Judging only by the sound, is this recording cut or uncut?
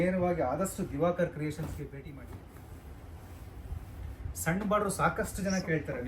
cut